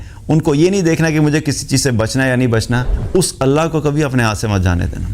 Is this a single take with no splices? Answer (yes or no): no